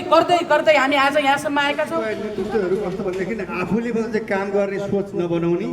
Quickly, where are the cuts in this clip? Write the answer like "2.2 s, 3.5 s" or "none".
2.0 s